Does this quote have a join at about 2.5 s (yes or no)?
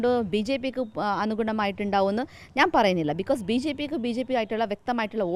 no